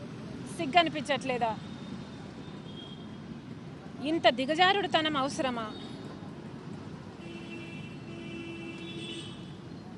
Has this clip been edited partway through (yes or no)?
no